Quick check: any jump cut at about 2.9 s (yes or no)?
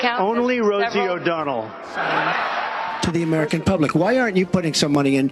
yes